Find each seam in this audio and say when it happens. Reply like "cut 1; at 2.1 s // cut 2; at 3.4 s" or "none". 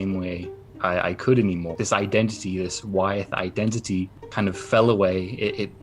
cut 1; at 1.7 s // cut 2; at 4.2 s